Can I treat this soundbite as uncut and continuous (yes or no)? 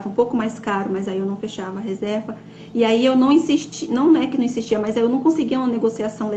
yes